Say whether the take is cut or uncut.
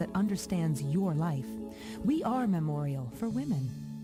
uncut